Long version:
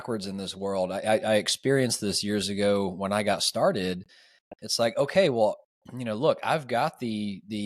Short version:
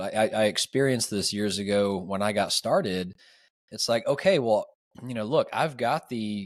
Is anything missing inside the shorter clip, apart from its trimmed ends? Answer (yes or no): no